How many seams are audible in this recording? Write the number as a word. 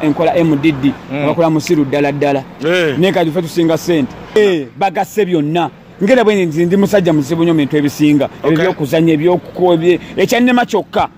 one